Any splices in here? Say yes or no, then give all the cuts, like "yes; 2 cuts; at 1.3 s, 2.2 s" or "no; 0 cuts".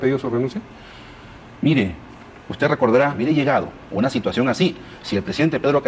yes; 1 cut; at 3.1 s